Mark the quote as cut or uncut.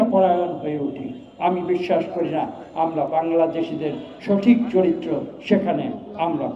uncut